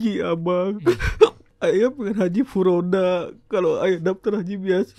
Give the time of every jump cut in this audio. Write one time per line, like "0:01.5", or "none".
0:01.5